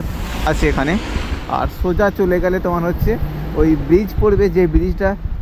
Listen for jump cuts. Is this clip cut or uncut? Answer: uncut